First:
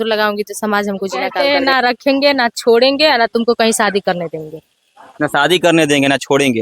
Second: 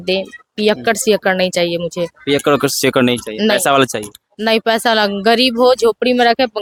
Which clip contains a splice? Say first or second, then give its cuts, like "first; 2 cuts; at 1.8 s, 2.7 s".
first; 1 cut; at 1.3 s